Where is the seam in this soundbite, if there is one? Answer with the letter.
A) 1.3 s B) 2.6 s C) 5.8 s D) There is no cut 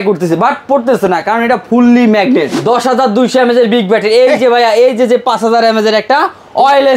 B